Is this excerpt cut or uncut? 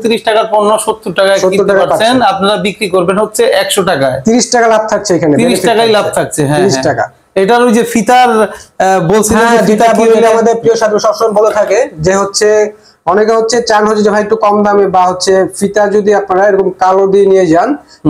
uncut